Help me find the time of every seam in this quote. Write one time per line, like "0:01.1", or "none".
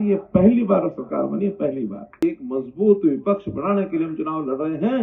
0:02.2